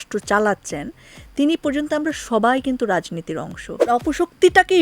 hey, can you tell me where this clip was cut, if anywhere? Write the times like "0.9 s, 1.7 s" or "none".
3.8 s